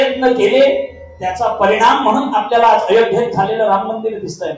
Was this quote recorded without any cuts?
yes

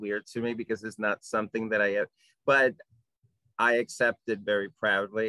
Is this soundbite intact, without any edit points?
yes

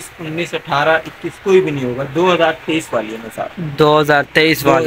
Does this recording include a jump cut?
no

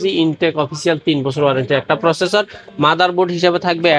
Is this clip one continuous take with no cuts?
yes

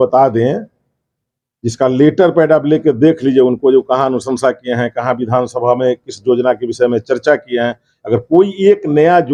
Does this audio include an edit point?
no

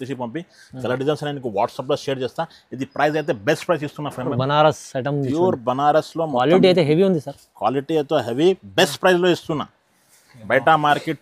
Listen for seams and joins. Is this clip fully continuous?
no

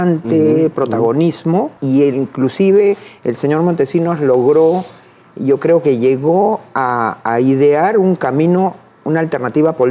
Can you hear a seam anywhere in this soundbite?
yes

